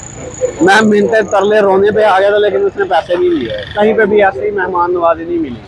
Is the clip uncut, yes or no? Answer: no